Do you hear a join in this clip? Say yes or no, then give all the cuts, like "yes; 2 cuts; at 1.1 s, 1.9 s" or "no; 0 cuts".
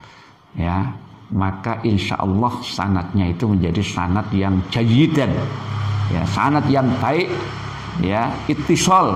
no; 0 cuts